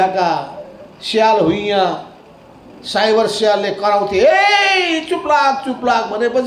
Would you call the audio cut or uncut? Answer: uncut